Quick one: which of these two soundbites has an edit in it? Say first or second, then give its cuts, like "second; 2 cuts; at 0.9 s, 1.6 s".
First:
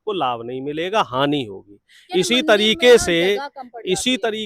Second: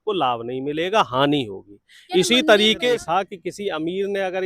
second; 1 cut; at 2.9 s